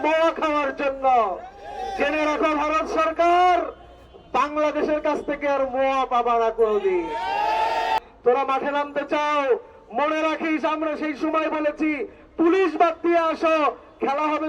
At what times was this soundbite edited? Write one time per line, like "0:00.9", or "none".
0:08.0